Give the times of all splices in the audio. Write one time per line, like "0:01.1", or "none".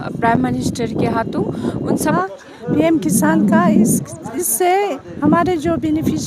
0:02.2